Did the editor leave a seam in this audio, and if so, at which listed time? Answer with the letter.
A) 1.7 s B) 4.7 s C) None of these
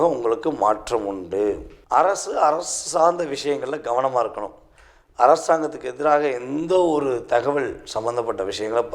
A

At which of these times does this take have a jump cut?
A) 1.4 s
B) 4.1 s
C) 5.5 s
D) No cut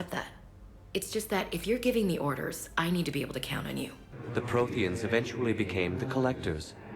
B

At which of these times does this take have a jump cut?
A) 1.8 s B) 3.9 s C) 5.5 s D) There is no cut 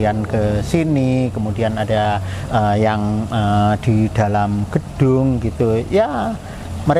D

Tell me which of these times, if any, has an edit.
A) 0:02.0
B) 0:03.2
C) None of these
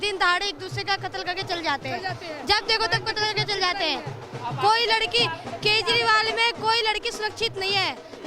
C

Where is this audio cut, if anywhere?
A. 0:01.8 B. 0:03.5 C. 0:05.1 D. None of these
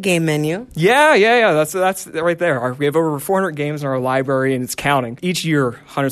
C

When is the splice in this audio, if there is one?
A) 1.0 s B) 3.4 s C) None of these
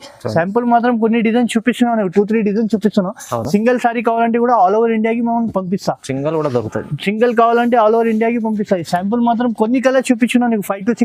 C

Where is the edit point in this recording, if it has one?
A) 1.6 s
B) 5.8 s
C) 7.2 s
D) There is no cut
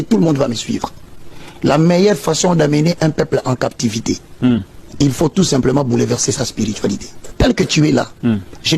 C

